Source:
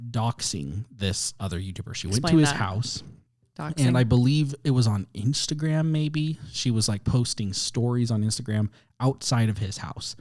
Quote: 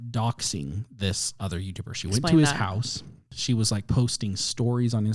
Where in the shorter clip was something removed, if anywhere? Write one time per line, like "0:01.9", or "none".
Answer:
0:03.3